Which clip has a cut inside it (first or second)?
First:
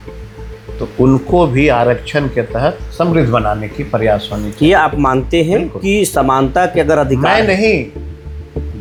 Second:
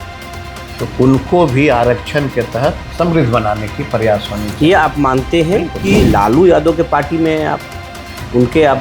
second